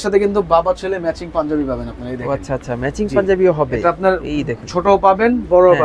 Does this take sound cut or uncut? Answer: uncut